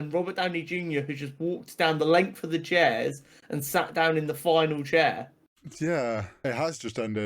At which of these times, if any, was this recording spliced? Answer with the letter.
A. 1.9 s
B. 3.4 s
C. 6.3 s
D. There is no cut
C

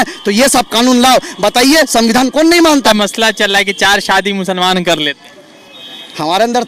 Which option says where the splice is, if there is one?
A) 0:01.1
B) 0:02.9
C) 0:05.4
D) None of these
B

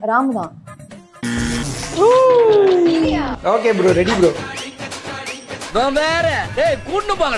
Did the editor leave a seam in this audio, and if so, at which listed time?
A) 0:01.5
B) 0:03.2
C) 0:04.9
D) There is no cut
B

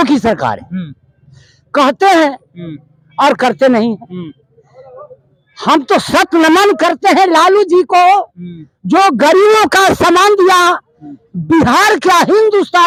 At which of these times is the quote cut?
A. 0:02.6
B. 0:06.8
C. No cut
C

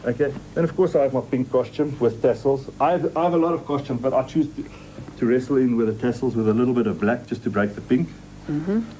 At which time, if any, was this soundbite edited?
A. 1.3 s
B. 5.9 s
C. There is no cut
B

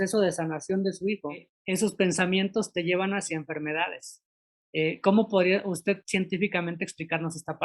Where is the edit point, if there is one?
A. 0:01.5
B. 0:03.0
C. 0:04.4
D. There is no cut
A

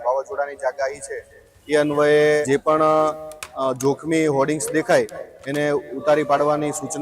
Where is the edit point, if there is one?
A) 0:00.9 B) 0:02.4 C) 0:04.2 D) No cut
B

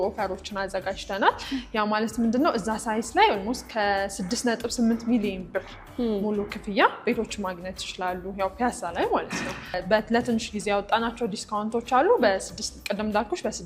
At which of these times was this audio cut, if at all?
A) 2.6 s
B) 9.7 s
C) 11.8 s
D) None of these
B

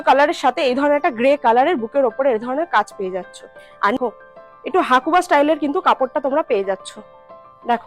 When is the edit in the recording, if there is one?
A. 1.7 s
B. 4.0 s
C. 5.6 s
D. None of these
B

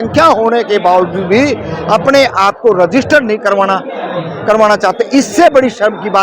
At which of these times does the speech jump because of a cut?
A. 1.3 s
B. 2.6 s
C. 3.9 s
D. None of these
D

